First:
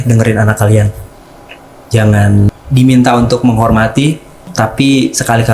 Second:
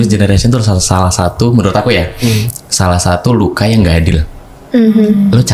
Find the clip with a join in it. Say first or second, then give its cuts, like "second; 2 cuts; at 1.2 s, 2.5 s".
first; 2 cuts; at 2.5 s, 4.5 s